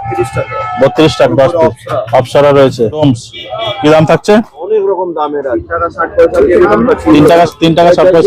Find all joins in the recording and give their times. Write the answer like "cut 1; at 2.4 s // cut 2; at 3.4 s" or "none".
cut 1; at 1.3 s // cut 2; at 3.0 s // cut 3; at 5.6 s